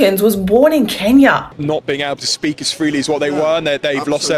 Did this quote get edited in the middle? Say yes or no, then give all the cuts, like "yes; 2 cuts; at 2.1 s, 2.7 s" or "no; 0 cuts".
yes; 1 cut; at 1.5 s